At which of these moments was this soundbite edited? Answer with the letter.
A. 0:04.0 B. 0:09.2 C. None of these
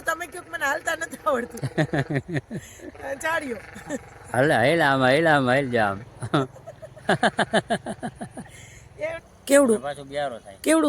B